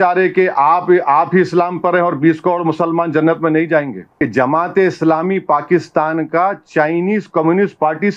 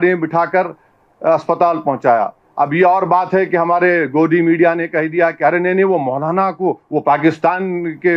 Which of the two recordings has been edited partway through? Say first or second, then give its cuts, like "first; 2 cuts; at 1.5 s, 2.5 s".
first; 1 cut; at 4.0 s